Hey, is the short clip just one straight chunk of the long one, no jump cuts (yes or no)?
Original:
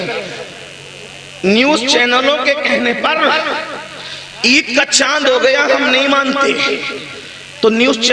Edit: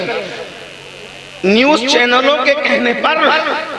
yes